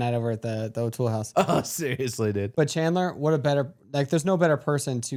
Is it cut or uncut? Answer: uncut